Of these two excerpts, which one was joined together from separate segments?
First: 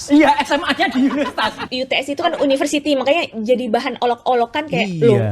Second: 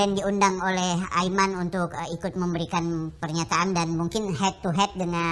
first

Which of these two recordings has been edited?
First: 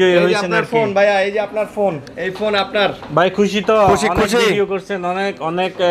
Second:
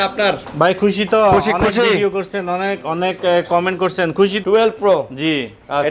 second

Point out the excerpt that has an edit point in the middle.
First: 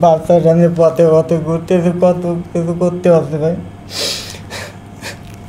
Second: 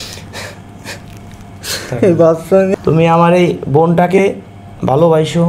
second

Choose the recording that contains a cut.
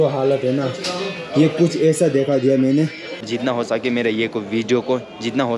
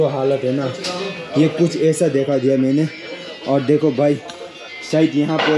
first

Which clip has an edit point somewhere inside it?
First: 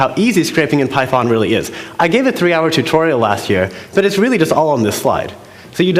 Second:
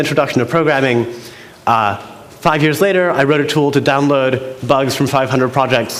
first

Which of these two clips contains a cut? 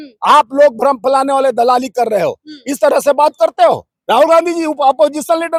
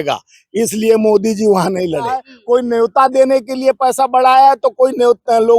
second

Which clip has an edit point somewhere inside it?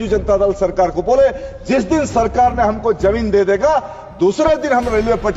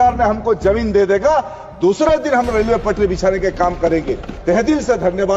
second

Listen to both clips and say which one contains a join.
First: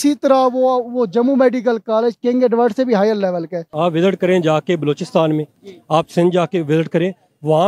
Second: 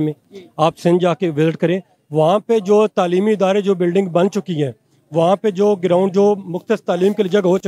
first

